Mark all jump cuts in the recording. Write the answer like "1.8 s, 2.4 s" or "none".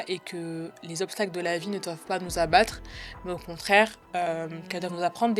none